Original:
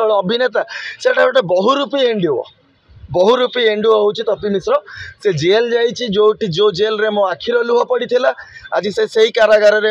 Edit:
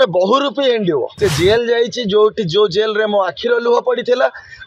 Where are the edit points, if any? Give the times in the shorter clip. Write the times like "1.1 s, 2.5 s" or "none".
1.1 s